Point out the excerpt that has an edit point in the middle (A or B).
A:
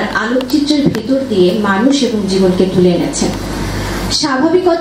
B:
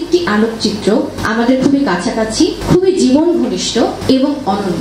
B